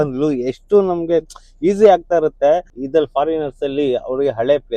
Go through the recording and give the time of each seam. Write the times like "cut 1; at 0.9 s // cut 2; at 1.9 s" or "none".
cut 1; at 2.7 s